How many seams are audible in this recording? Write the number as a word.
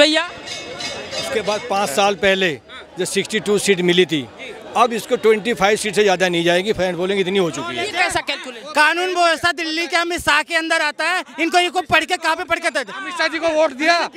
two